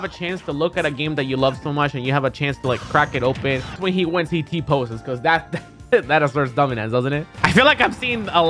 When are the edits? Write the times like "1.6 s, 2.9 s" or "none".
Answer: 3.8 s, 7.3 s